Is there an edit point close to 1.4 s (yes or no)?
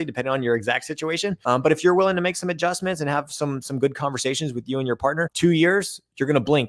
yes